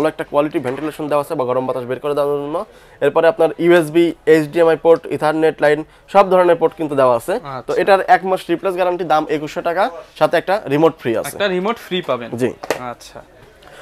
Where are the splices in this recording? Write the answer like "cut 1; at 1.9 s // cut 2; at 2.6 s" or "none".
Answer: none